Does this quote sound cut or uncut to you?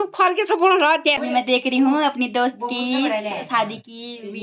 cut